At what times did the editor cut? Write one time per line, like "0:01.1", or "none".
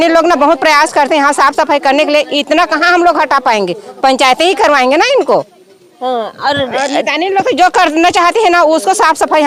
none